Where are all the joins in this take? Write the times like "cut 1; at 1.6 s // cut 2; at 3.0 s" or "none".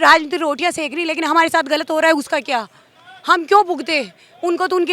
none